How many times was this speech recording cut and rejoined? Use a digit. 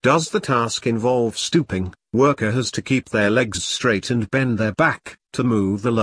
1